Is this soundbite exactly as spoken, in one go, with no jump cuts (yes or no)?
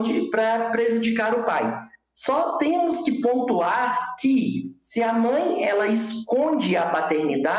yes